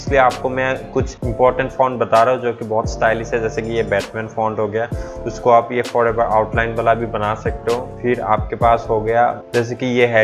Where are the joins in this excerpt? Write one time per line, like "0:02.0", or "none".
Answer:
0:01.2
0:07.9
0:09.4